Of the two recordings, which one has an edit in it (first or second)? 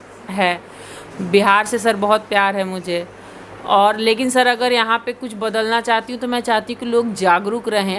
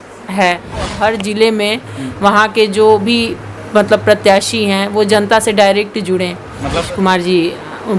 second